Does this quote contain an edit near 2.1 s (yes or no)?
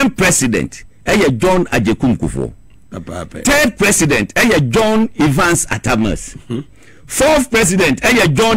no